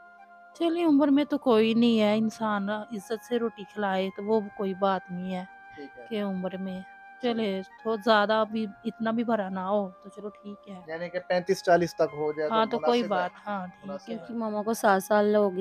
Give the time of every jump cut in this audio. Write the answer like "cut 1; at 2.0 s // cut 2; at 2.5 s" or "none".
cut 1; at 14.2 s